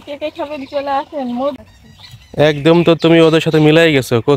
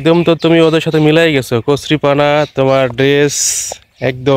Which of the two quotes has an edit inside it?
first; 1 cut; at 1.6 s

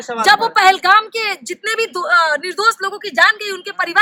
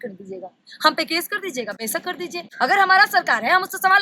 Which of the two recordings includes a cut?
second; 1 cut; at 2.4 s

